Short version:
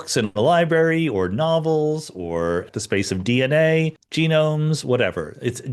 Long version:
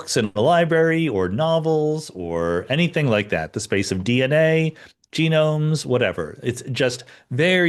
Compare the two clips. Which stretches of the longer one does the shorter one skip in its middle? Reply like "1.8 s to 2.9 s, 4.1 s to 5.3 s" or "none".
2.7 s to 3.5 s, 4.8 s to 5.0 s